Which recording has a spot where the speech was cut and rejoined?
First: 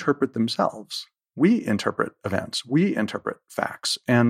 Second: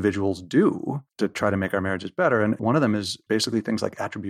second; 2 cuts; at 1.0 s, 2.6 s

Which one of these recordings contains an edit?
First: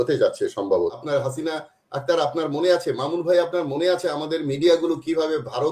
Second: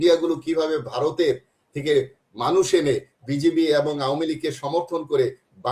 first; 1 cut; at 0.9 s

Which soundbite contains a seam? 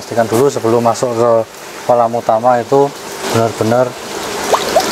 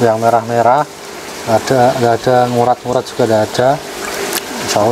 first; 1 cut; at 3.2 s

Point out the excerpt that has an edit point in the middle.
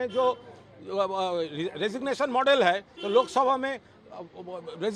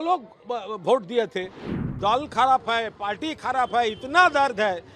second; 1 cut; at 1.8 s

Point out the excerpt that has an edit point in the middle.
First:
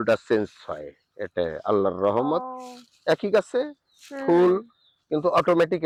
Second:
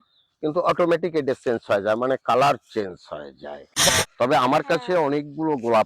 second; 1 cut; at 3.9 s

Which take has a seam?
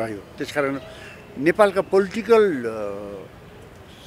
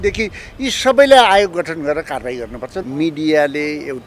second; 1 cut; at 2.8 s

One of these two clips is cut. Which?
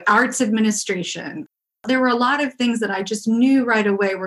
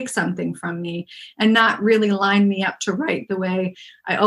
first; 1 cut; at 1.6 s

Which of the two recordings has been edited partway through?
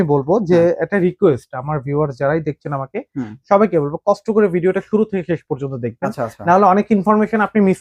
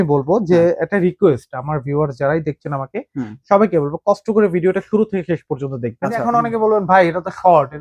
second; 1 cut; at 6.2 s

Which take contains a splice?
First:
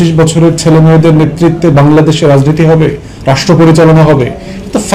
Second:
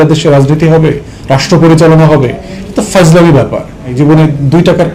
second; 1 cut; at 3.9 s

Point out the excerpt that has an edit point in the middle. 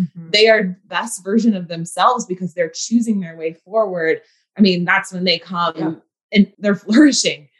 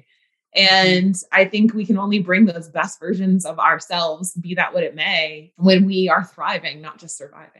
first; 3 cuts; at 0.9 s, 4.4 s, 6.5 s

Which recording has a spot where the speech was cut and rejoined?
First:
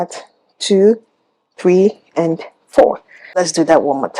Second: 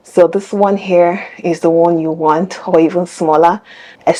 first; 1 cut; at 3.2 s

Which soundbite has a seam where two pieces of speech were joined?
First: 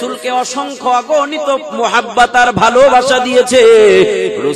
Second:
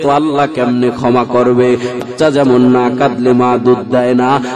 second; 1 cut; at 2.1 s

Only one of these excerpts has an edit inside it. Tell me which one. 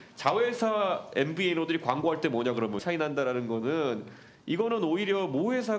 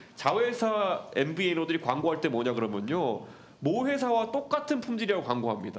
first; 1 cut; at 2.8 s

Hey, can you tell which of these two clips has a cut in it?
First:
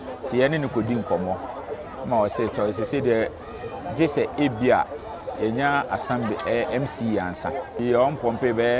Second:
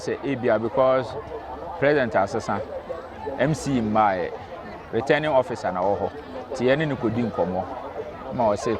first; 1 cut; at 7.7 s

